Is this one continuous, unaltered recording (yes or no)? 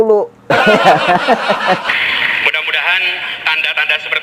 no